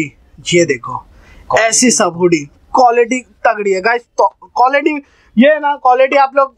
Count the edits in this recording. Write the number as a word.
zero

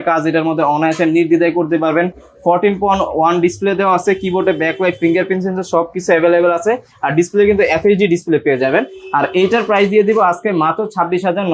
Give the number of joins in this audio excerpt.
zero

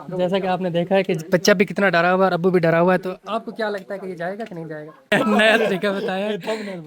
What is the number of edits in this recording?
one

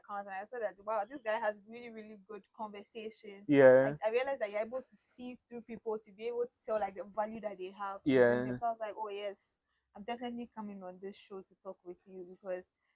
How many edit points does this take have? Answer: zero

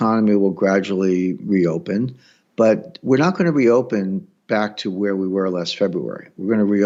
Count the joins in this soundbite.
zero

